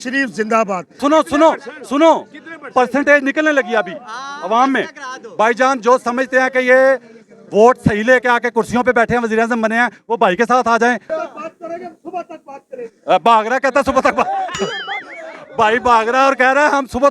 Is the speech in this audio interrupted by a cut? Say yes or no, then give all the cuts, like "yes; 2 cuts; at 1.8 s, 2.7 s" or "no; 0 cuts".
yes; 2 cuts; at 1.0 s, 11.1 s